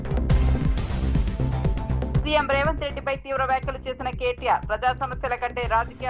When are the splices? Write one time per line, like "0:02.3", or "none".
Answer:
0:02.2

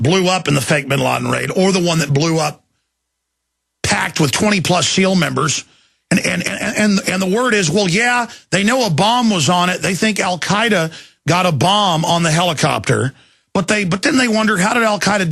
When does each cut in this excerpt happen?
0:06.7

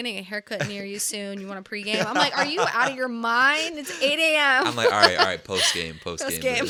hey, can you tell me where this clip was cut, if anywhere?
none

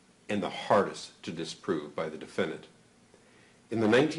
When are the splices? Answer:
none

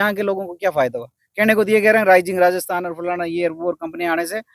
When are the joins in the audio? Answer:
none

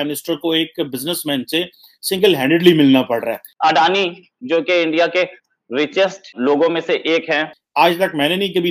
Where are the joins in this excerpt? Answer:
0:03.4
0:06.3
0:07.6

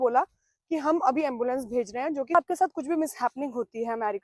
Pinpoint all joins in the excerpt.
0:02.3

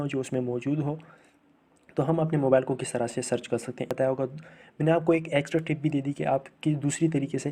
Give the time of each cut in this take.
0:03.9

